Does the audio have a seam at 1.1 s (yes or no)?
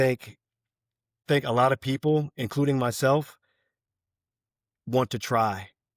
yes